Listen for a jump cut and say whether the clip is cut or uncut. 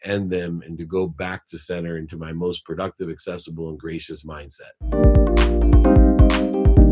uncut